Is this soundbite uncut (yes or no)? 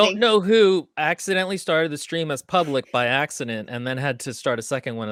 yes